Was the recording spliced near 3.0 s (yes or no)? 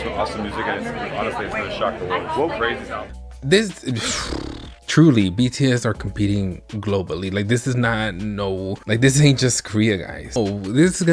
yes